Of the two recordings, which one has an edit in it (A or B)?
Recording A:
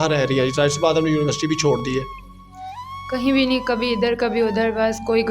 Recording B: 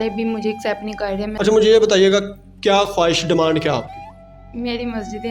B